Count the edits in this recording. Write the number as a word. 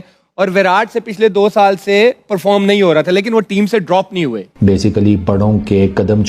one